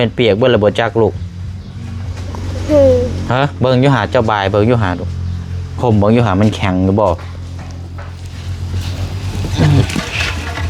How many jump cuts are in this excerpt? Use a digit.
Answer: 1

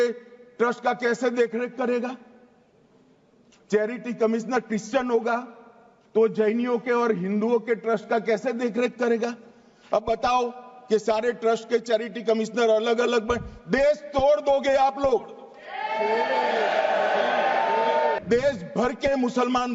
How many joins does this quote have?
1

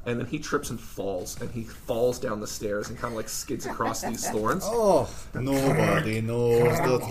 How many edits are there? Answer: 1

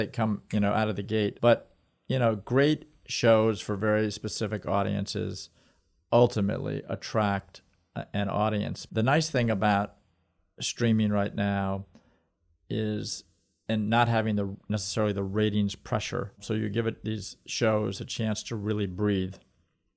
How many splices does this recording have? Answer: 3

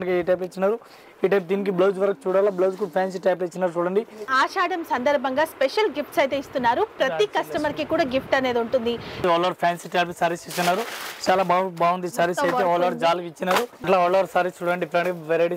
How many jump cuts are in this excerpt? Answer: 3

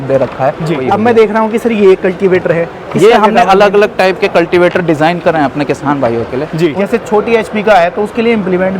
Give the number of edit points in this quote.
2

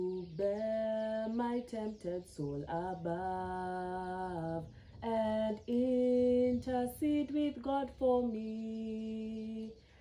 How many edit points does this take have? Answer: 0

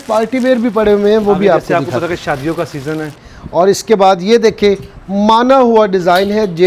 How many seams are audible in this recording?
1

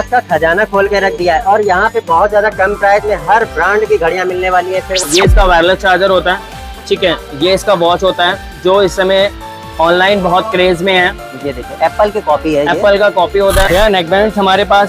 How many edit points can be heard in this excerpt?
2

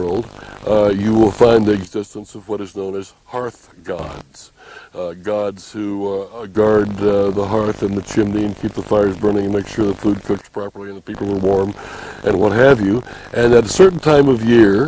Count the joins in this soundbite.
1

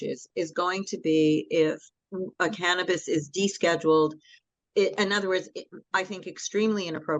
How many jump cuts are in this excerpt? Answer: 0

